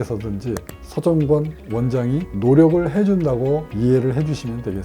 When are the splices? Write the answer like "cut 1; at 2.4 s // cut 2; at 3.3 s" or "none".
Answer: none